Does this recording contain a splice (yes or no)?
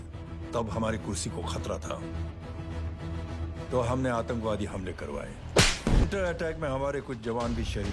yes